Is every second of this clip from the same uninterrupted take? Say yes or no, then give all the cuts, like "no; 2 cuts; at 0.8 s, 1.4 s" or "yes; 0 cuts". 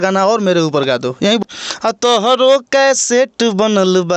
no; 1 cut; at 1.4 s